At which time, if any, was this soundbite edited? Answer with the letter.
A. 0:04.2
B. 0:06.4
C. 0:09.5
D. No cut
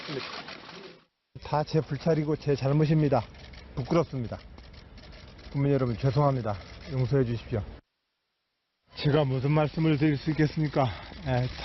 C